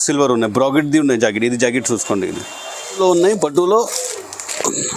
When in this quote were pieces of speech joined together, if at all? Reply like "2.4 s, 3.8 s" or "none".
3.0 s